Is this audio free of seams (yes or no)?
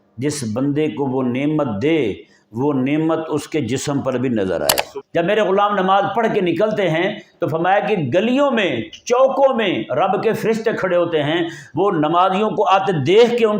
no